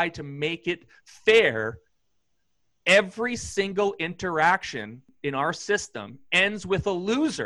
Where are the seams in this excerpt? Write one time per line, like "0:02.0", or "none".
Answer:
0:05.0